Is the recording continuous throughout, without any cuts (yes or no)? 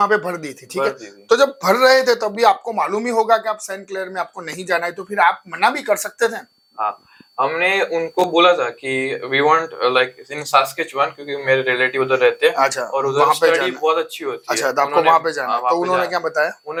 yes